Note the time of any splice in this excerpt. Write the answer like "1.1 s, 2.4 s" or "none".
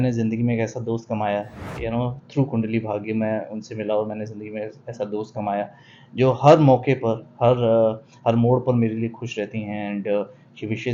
none